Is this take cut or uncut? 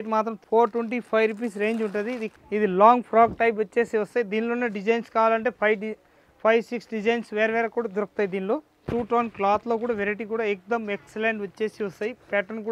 cut